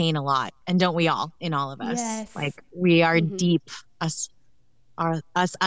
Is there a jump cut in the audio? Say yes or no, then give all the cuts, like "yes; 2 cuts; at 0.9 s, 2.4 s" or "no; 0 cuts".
no; 0 cuts